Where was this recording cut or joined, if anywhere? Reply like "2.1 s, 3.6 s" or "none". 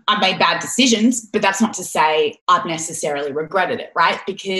2.4 s